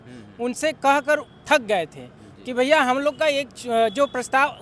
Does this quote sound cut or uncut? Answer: uncut